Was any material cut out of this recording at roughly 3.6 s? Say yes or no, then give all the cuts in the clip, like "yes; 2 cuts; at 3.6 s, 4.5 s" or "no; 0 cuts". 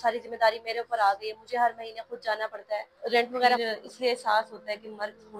yes; 1 cut; at 3.6 s